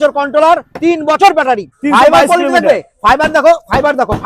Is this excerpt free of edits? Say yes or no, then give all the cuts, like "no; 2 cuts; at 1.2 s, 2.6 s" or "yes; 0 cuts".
no; 1 cut; at 1.7 s